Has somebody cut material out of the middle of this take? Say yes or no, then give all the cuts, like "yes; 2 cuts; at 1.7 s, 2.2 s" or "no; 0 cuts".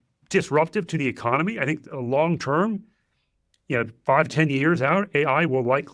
no; 0 cuts